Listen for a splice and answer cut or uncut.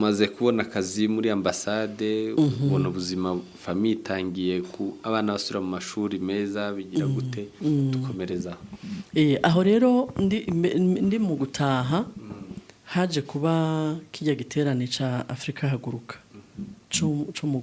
uncut